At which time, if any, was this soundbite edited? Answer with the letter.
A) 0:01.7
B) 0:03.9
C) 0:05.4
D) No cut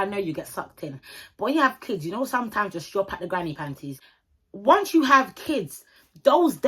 B